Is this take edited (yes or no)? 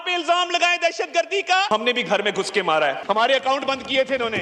yes